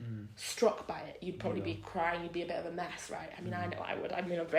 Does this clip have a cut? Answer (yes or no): no